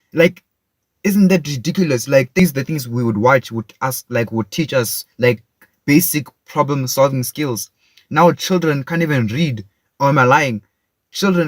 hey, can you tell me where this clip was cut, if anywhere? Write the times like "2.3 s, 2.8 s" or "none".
2.4 s